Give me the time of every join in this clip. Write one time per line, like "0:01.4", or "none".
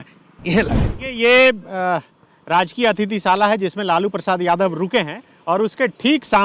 0:00.9